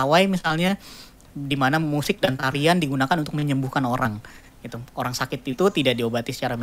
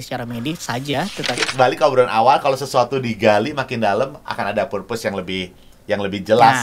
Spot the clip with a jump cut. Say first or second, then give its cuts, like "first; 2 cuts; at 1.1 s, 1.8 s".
second; 1 cut; at 1.4 s